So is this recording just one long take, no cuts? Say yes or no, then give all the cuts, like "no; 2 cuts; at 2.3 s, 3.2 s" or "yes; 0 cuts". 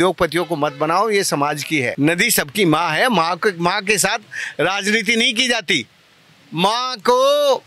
no; 1 cut; at 1.9 s